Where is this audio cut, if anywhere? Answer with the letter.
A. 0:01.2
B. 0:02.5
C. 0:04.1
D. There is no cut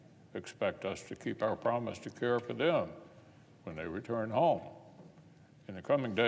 B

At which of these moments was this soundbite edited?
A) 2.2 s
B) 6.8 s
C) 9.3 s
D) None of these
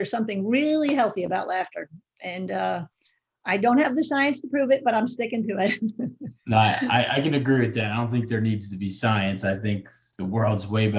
D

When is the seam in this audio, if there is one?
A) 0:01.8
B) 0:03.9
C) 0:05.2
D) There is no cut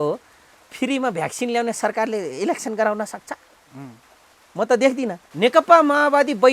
C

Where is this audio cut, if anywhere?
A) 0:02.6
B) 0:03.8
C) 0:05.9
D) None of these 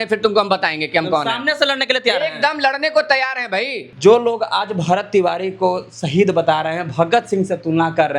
B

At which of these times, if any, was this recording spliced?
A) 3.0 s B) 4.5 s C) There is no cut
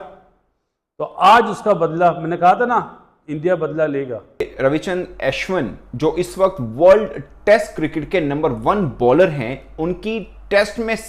B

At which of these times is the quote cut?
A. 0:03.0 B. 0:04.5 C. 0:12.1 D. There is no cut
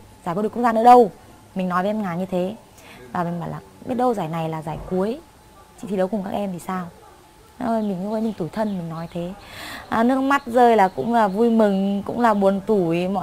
D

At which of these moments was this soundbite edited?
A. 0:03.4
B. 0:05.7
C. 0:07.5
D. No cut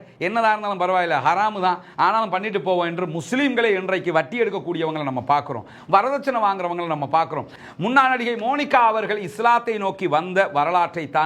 C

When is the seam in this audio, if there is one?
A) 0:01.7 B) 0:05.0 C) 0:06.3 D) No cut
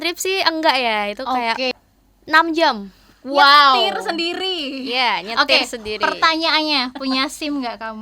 A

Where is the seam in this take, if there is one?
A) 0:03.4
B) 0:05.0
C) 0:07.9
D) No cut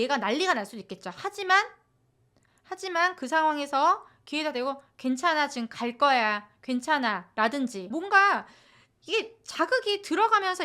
C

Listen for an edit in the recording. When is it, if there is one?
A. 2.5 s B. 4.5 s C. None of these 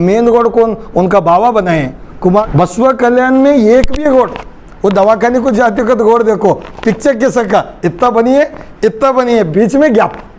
A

